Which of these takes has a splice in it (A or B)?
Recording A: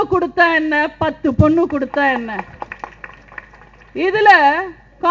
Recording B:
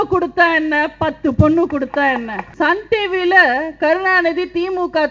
B